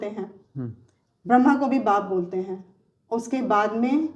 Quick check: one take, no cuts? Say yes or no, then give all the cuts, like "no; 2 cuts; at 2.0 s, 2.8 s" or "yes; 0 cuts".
yes; 0 cuts